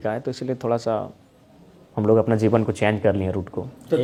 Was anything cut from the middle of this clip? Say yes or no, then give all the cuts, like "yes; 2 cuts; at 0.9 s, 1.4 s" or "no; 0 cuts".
no; 0 cuts